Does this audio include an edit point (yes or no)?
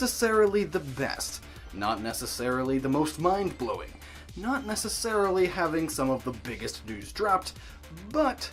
no